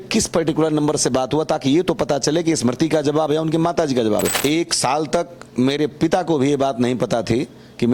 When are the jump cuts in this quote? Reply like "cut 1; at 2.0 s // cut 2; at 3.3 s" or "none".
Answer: cut 1; at 4.4 s